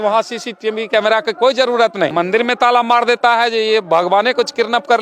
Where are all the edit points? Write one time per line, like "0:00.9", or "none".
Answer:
0:02.1